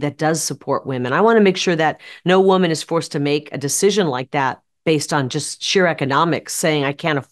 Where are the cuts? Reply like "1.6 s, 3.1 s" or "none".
none